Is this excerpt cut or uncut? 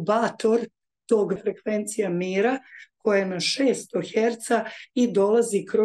cut